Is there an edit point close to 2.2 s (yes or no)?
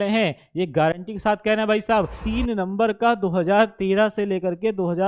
yes